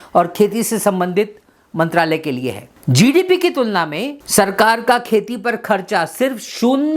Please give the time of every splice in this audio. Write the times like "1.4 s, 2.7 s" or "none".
2.7 s, 4.1 s